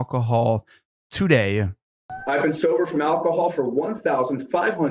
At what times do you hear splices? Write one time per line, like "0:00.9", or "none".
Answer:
0:02.2